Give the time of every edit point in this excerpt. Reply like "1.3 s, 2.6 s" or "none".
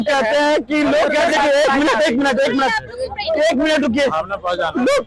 1.3 s